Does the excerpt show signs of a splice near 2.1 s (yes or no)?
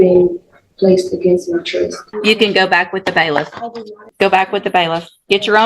yes